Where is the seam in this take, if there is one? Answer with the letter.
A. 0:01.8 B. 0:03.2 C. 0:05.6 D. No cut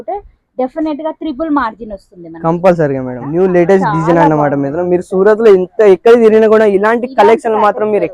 B